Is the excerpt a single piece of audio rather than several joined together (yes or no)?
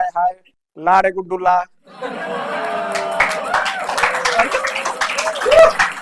yes